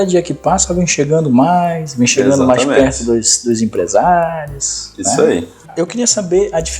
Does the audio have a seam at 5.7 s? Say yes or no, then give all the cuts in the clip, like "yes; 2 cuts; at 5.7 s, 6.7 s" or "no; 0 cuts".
yes; 1 cut; at 5.7 s